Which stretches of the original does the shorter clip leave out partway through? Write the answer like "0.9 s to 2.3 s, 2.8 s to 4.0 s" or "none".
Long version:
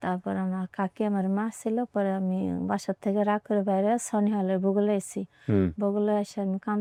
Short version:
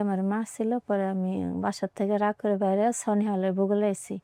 none